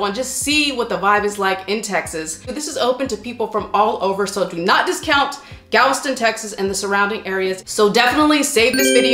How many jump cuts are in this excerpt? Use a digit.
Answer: 0